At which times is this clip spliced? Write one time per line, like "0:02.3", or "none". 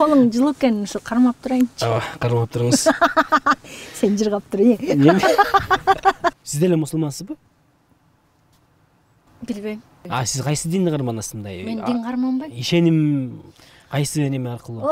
0:06.4
0:10.0